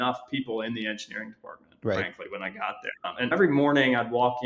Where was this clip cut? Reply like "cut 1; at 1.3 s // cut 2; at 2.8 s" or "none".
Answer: cut 1; at 3.3 s